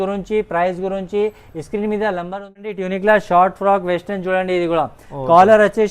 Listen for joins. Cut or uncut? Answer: cut